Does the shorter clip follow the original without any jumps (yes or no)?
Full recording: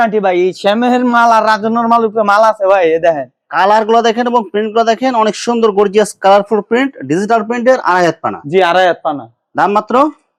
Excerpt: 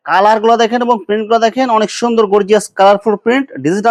yes